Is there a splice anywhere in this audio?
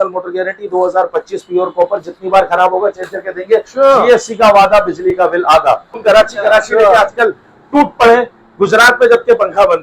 yes; 1 cut; at 6.0 s

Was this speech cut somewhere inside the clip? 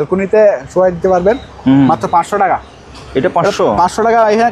no; 0 cuts

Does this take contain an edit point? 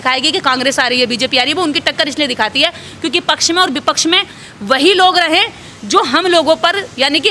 no; 0 cuts

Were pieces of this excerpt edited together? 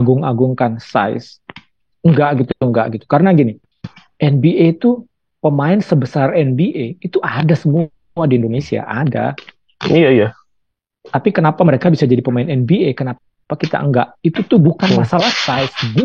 no; 0 cuts

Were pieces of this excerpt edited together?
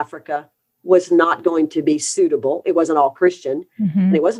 no; 0 cuts

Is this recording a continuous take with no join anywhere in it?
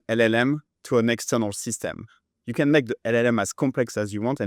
yes; 0 cuts

